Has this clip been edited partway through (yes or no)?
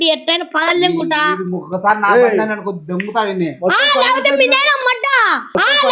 no